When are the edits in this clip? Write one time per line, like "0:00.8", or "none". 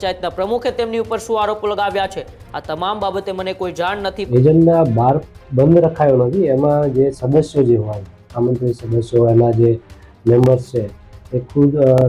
0:04.3